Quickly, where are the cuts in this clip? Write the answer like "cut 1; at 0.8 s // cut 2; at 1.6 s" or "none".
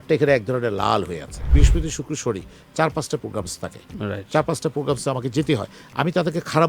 cut 1; at 1.5 s